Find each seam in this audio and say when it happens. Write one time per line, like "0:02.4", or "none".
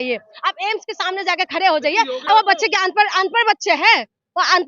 0:02.3